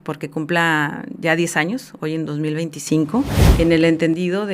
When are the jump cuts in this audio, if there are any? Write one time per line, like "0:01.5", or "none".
0:03.4